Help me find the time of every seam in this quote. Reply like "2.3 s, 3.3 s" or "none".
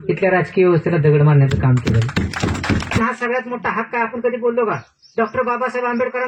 3.0 s